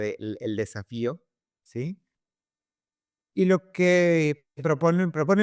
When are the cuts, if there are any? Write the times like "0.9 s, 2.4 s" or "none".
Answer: none